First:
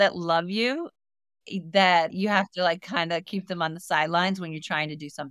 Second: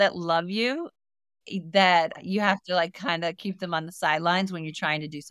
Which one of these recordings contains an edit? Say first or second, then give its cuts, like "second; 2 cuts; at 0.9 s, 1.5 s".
first; 1 cut; at 2.1 s